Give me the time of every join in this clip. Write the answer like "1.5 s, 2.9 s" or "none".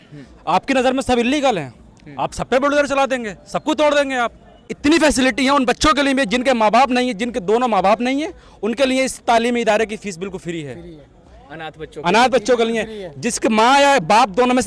4.6 s